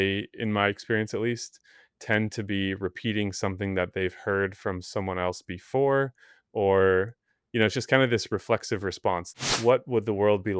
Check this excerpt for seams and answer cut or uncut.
cut